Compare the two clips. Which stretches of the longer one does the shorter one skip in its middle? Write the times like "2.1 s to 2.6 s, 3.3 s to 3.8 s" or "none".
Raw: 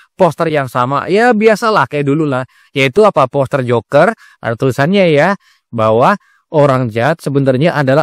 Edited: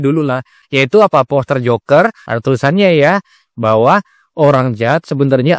4.3 s to 4.4 s